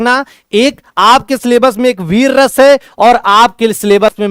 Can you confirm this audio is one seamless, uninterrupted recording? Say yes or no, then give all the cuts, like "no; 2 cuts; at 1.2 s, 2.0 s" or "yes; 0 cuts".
yes; 0 cuts